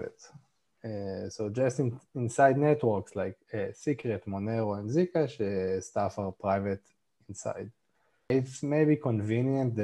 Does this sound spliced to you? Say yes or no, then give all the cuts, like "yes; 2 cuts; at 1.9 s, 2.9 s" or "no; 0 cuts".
yes; 1 cut; at 8.3 s